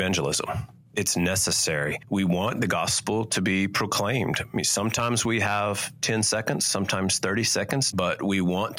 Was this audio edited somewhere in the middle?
yes; 3 cuts; at 0.9 s, 2.0 s, 7.9 s

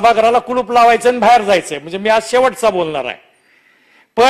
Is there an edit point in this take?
no; 0 cuts

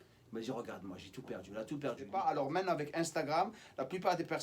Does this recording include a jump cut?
yes; 1 cut; at 2.1 s

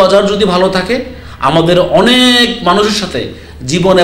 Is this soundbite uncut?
yes; 0 cuts

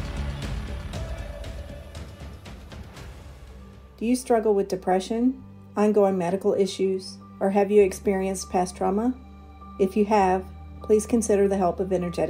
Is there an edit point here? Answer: no; 0 cuts

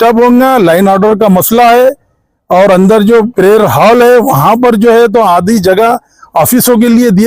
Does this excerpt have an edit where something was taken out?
no; 0 cuts

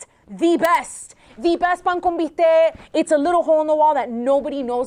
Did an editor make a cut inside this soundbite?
no; 0 cuts

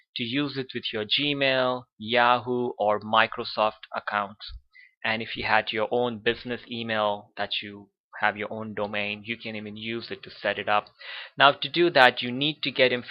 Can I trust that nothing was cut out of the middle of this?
no; 1 cut; at 1.2 s

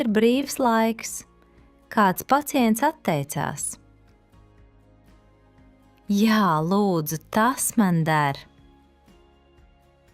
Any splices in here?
yes; 2 cuts; at 3.8 s, 5.5 s

